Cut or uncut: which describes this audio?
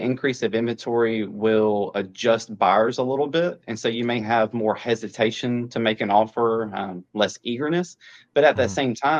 uncut